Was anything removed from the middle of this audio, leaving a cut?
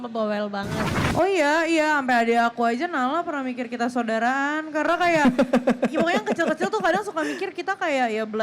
yes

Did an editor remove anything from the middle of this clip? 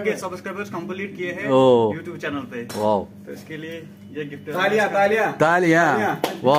no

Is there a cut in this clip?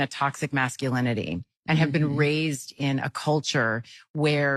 yes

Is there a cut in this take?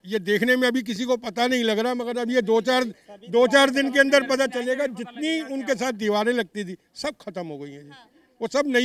no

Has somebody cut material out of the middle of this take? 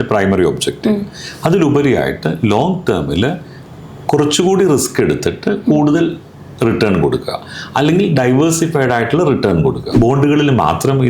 yes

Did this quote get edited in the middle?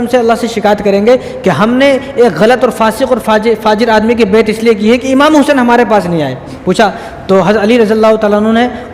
yes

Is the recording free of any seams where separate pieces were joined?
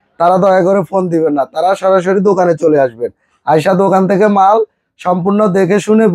yes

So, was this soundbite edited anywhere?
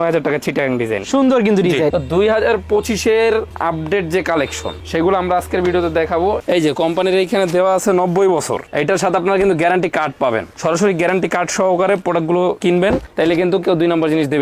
yes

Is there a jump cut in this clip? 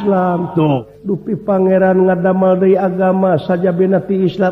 yes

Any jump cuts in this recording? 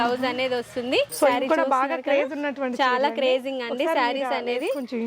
yes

